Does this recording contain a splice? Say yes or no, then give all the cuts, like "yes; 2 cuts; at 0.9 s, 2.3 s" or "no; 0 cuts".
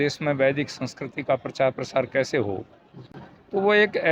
no; 0 cuts